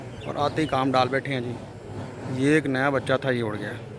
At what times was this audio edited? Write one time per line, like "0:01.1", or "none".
none